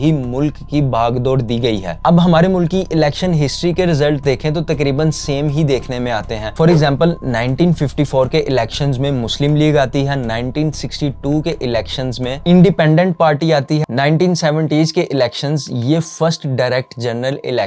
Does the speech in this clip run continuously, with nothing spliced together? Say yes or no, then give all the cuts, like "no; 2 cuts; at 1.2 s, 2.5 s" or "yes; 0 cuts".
yes; 0 cuts